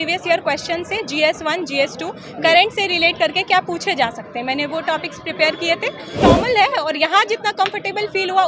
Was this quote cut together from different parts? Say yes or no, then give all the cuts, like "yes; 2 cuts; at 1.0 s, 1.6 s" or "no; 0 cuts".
yes; 1 cut; at 6.2 s